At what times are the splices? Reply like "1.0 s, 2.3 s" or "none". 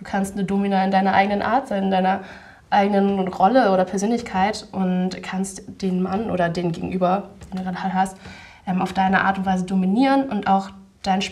none